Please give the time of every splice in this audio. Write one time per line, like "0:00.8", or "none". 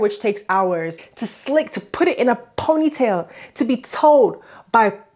0:01.1

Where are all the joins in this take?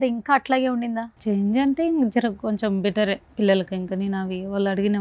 0:01.1

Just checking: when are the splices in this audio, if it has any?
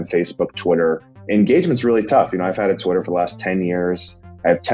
0:01.2

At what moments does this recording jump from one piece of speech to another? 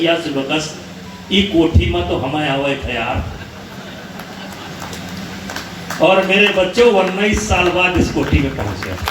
none

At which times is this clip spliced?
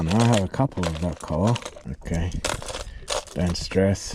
0:01.8

